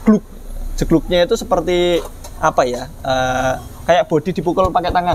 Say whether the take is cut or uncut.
uncut